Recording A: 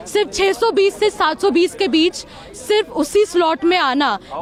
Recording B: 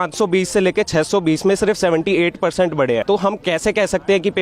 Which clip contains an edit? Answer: B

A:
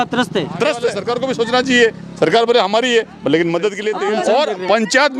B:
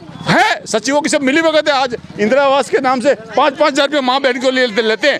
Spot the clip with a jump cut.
A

